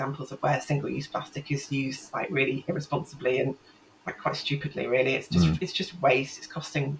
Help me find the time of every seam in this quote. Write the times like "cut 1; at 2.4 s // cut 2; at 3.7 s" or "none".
none